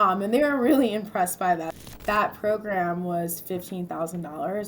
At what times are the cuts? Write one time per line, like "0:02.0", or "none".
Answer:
0:01.7